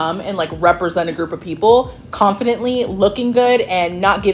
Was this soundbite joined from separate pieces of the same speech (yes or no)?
no